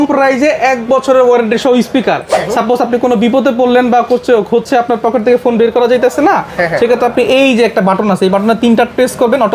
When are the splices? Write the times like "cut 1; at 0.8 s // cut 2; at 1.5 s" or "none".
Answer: cut 1; at 2.3 s